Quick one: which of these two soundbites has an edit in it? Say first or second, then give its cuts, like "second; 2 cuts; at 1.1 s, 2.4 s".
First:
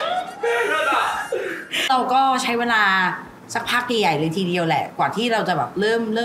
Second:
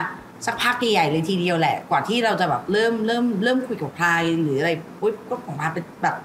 first; 1 cut; at 1.9 s